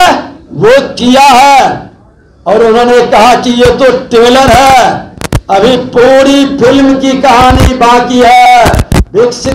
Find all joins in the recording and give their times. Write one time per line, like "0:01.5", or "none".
none